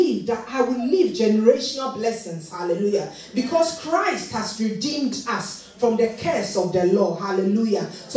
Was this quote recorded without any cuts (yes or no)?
yes